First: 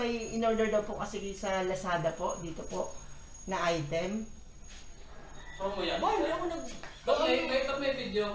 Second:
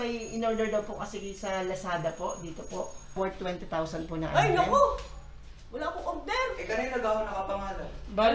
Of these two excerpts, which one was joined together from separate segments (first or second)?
second